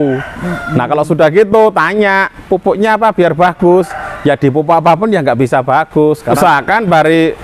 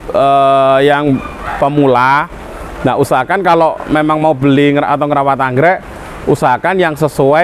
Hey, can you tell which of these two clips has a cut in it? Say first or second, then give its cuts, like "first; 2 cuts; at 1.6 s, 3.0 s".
first; 1 cut; at 6.3 s